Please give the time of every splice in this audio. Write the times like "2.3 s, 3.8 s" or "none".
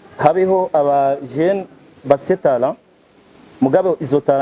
none

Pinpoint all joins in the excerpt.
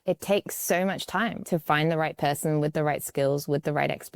1.4 s

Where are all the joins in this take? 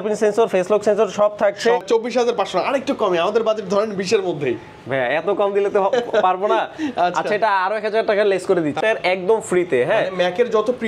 1.8 s, 8.8 s

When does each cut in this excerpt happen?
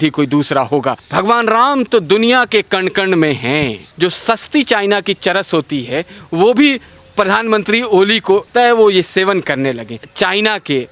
1.0 s, 3.8 s, 8.5 s, 10.0 s

